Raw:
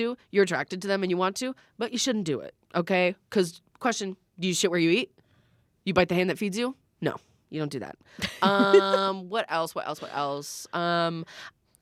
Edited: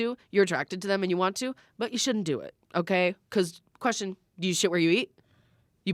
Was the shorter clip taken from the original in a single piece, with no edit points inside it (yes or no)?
yes